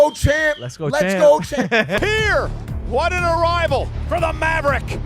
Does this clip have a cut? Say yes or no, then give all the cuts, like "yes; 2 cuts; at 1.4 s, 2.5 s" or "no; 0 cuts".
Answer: yes; 1 cut; at 2.0 s